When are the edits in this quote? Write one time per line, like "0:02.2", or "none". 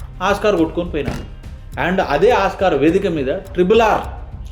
none

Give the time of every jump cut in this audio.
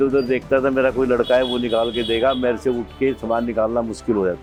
none

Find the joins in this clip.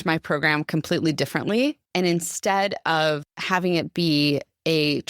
0:01.8
0:03.3

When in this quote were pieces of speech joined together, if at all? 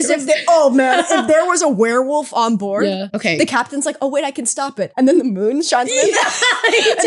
0:03.1
0:04.9

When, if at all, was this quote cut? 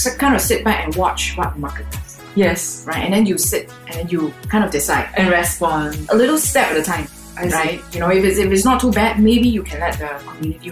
0:06.5

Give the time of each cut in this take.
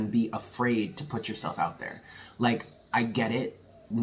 none

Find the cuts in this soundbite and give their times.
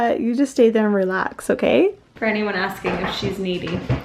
0:02.1

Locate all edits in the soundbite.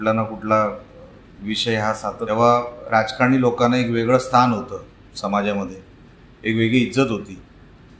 0:02.2

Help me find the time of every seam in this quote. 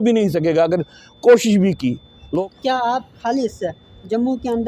0:02.3

